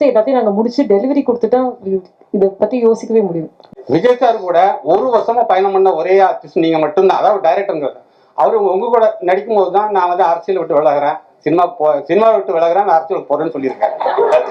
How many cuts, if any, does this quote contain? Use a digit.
1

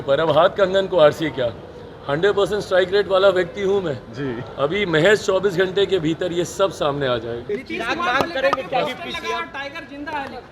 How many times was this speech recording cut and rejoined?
1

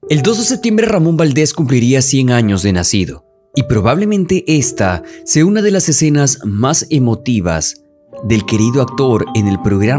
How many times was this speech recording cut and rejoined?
1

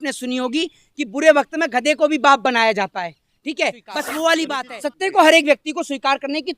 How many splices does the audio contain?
1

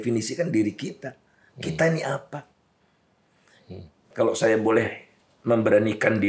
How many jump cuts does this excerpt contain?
1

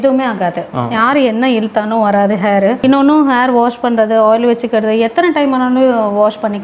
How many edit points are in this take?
1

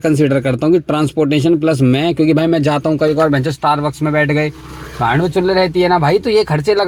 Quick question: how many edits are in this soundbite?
0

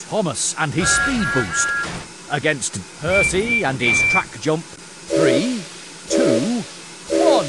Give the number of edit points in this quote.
0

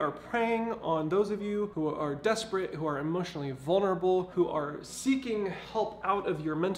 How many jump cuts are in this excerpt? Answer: 2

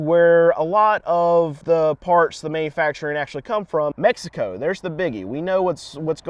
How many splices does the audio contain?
2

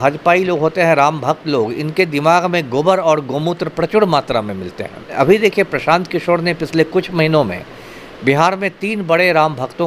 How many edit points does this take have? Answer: 1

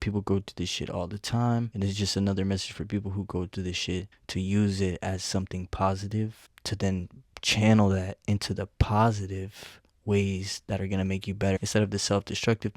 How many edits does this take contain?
1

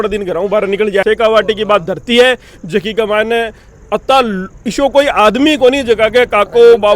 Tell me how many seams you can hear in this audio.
1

